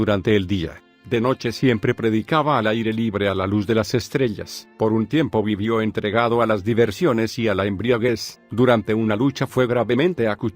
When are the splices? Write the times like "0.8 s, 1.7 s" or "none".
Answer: 2.4 s

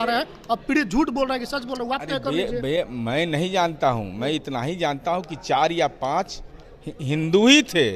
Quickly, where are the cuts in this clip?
none

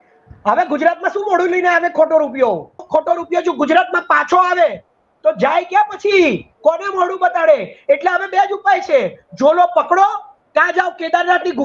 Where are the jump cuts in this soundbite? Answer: 2.8 s

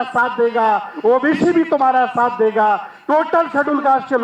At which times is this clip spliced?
none

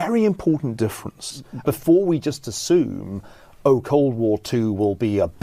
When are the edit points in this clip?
1.5 s

